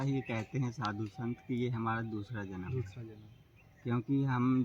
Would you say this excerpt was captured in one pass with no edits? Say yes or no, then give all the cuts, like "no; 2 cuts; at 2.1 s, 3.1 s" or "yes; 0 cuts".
yes; 0 cuts